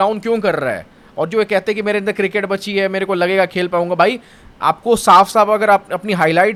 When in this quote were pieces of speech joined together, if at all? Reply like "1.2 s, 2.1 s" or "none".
none